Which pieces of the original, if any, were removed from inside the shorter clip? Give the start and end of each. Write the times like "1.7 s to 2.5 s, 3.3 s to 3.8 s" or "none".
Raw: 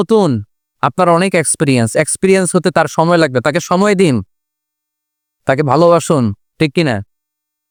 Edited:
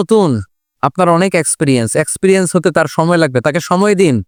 none